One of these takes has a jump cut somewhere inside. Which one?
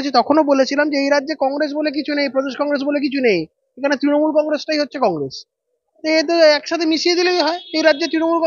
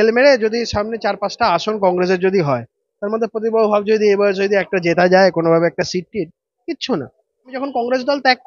second; 1 cut; at 7.6 s

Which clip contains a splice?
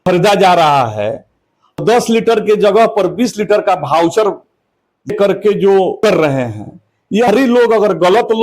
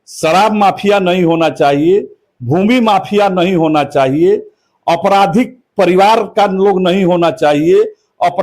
first; 4 cuts; at 1.8 s, 5.1 s, 6.0 s, 7.3 s

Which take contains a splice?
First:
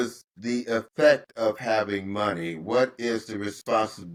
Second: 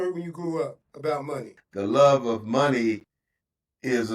second; 1 cut; at 1.5 s

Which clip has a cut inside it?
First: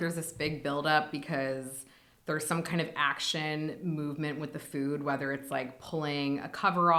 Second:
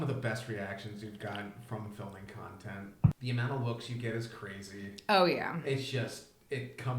second; 1 cut; at 3.2 s

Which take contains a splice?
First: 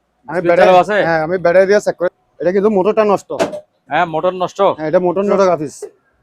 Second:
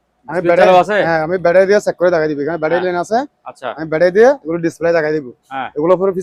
first; 2 cuts; at 2.1 s, 5.3 s

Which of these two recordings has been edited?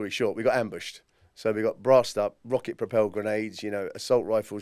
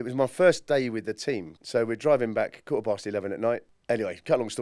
second; 2 cuts; at 1.5 s, 3.7 s

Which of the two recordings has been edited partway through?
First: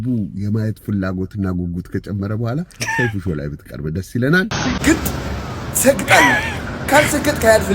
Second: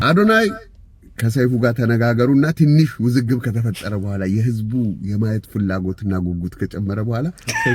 first; 1 cut; at 4.5 s

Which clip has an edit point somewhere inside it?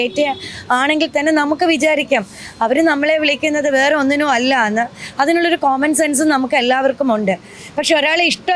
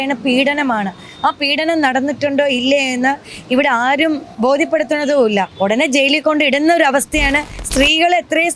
second; 3 cuts; at 4.3 s, 5.5 s, 7.6 s

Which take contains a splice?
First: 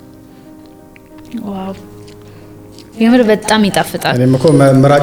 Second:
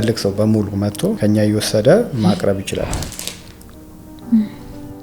second; 2 cuts; at 1.2 s, 2.9 s

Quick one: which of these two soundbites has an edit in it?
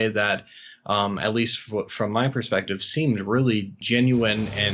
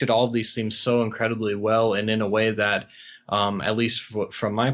first; 1 cut; at 3.8 s

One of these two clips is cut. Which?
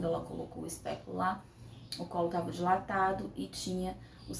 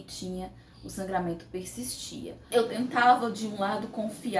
second; 1 cut; at 2.4 s

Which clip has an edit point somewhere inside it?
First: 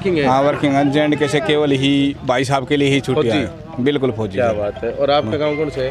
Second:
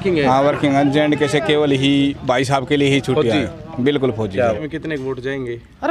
second; 1 cut; at 4.6 s

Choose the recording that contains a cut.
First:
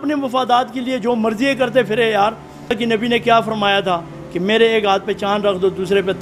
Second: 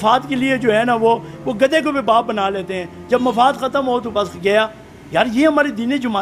first; 1 cut; at 2.8 s

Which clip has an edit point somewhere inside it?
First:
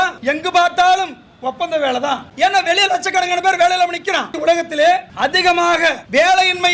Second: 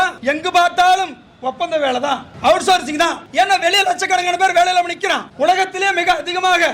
first; 2 cuts; at 2.3 s, 4.3 s

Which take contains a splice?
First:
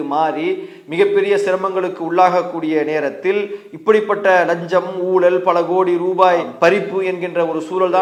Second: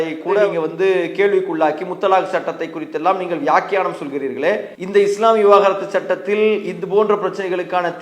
second; 1 cut; at 4.7 s

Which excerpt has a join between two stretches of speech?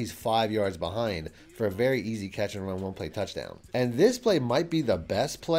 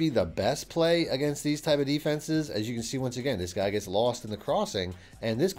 first; 1 cut; at 3.6 s

